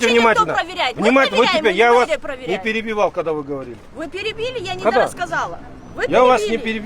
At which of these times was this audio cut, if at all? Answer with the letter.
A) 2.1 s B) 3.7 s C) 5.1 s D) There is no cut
D